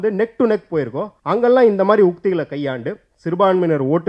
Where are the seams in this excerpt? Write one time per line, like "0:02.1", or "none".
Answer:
0:01.1